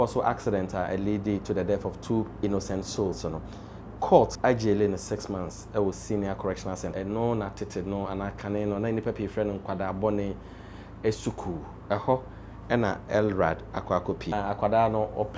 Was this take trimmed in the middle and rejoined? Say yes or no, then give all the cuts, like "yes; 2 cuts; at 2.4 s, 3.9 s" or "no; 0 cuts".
yes; 2 cuts; at 6.9 s, 14.3 s